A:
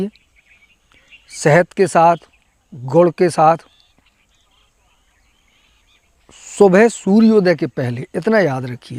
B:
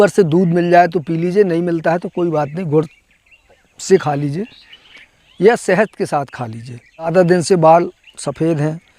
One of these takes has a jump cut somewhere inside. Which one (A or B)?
B